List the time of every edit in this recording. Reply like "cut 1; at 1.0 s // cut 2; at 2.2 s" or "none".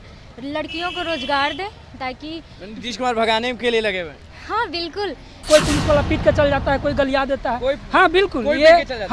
cut 1; at 5.3 s